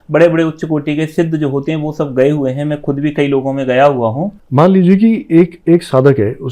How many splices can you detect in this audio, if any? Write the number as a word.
one